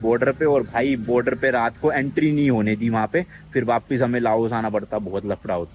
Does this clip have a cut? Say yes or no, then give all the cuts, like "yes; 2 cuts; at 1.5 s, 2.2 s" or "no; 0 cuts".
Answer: no; 0 cuts